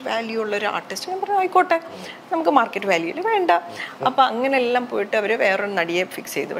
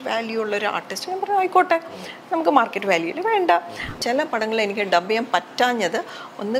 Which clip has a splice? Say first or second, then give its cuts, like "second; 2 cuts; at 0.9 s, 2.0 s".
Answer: second; 1 cut; at 3.9 s